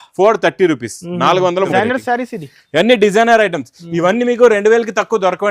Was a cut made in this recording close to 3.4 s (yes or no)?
no